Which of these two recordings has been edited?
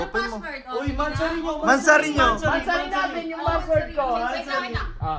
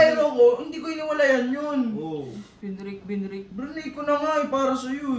second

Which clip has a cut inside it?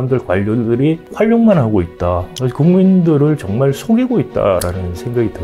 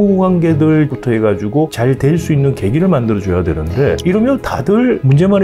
second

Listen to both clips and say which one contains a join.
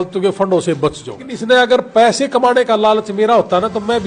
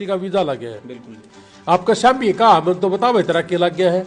first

